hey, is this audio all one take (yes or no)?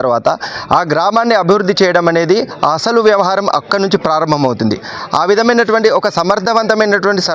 yes